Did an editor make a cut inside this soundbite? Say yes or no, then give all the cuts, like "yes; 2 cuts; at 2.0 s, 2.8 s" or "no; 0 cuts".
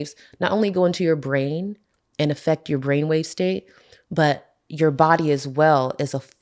no; 0 cuts